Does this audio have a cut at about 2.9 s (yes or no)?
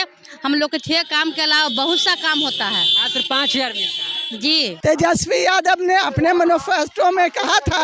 no